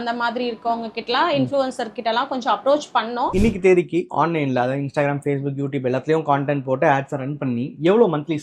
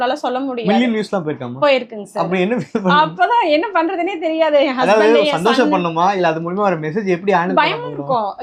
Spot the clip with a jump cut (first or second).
first